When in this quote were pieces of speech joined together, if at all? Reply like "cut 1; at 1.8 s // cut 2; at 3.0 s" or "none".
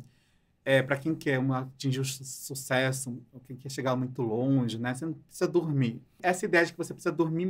cut 1; at 6.2 s

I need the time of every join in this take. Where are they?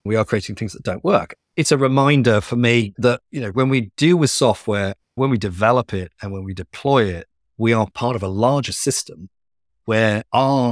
cut 1; at 1.5 s

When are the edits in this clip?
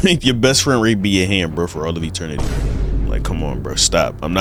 none

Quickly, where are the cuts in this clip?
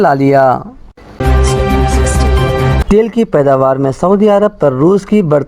cut 1; at 1.0 s // cut 2; at 2.8 s

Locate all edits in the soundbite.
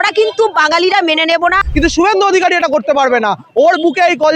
cut 1; at 1.6 s

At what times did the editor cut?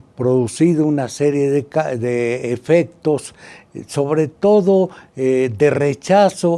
cut 1; at 4.4 s

